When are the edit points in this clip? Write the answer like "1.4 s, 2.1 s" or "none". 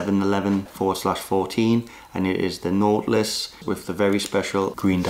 3.6 s